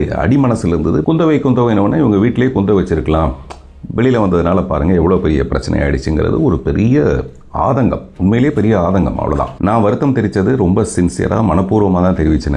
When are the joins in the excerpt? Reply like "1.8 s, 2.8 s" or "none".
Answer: 1.0 s, 9.5 s